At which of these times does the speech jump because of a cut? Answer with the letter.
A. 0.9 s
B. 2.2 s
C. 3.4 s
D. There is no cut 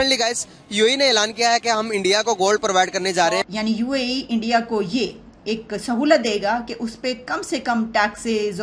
C